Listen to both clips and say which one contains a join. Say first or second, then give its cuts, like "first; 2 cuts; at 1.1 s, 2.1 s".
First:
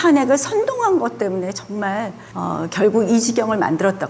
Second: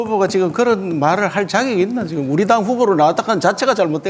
first; 1 cut; at 2.2 s